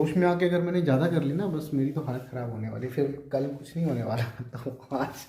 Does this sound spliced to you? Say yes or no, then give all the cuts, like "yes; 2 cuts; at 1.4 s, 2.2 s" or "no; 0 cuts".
no; 0 cuts